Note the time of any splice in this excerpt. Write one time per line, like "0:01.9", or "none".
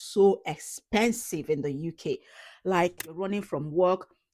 0:03.2